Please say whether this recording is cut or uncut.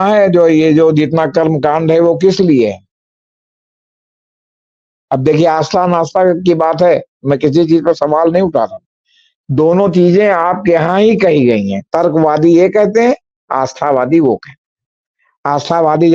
uncut